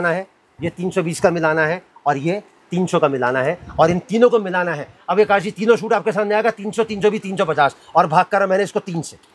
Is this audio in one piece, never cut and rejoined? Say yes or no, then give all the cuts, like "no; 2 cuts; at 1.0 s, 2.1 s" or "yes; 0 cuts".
yes; 0 cuts